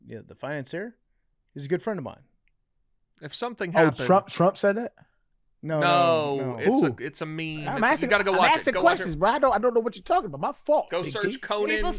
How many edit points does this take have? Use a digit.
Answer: 0